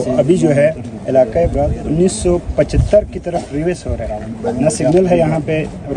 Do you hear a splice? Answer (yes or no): yes